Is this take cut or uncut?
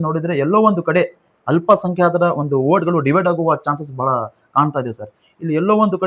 uncut